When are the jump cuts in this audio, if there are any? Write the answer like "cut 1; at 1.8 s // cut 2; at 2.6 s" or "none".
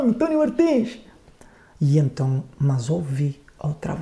none